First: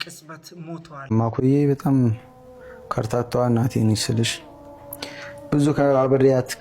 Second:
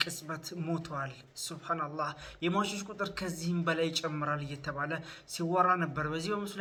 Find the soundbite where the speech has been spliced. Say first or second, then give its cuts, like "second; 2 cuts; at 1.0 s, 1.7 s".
first; 1 cut; at 1.0 s